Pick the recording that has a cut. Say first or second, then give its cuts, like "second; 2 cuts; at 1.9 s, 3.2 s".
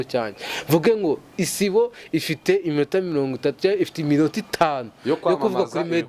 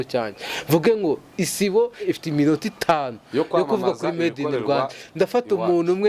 second; 1 cut; at 2.0 s